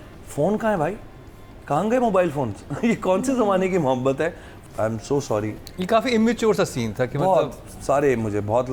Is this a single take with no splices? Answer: no; 1 cut; at 4.6 s

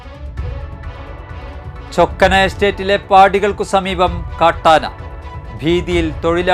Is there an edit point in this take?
yes; 2 cuts; at 1.0 s, 1.9 s

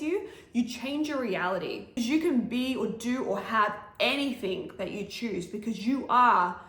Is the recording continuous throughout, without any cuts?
no; 1 cut; at 1.9 s

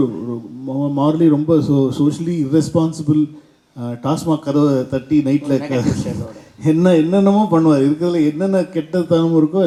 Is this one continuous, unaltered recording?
yes; 0 cuts

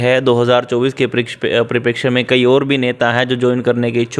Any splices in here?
no; 0 cuts

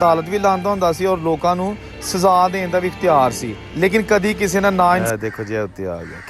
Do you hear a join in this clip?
yes; 1 cut; at 5.0 s

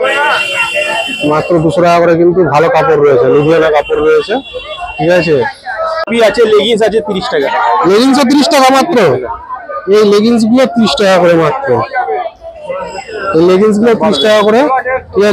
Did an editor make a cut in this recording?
yes; 1 cut; at 6.1 s

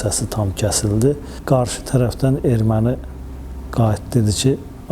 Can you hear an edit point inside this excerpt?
yes; 1 cut; at 1.3 s

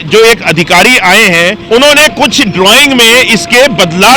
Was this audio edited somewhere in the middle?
yes; 1 cut; at 1.6 s

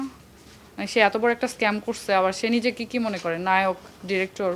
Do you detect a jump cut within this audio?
no; 0 cuts

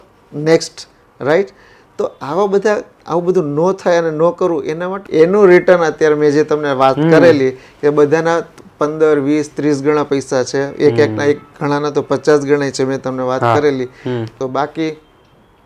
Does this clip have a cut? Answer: yes; 2 cuts; at 4.9 s, 14.3 s

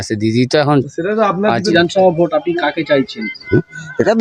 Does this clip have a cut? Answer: yes; 1 cut; at 1.7 s

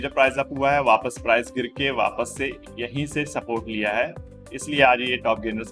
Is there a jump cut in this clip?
no; 0 cuts

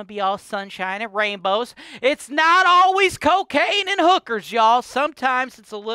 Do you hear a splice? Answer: no; 0 cuts

